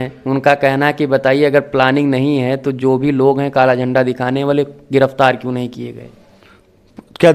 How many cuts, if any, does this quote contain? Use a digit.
0